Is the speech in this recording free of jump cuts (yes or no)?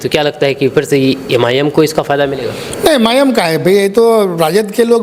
yes